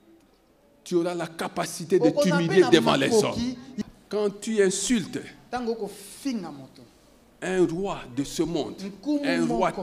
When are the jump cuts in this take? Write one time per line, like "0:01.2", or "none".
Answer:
0:03.7